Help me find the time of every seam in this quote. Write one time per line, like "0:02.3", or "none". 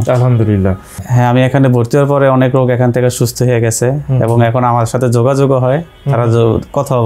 0:01.0